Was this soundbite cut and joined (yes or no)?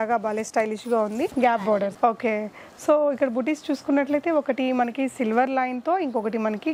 no